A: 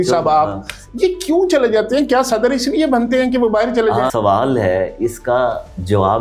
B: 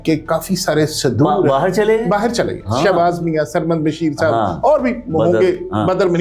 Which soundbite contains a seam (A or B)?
A